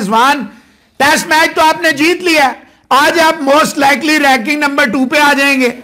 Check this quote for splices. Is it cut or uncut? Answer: uncut